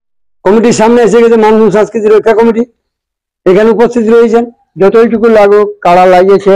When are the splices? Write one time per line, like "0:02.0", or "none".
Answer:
0:04.6